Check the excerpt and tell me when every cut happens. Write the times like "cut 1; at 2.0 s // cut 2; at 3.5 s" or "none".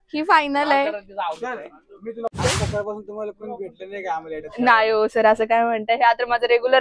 cut 1; at 2.3 s

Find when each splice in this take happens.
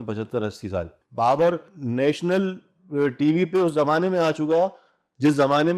cut 1; at 0.9 s

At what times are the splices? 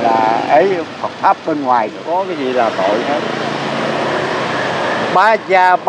cut 1; at 2.2 s

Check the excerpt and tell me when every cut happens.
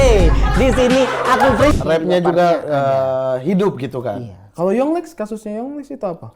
cut 1; at 1.8 s

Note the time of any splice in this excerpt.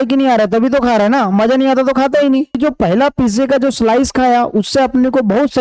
cut 1; at 2.5 s

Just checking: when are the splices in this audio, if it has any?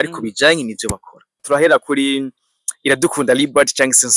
cut 1; at 1.3 s

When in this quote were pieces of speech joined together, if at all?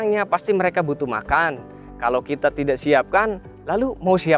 none

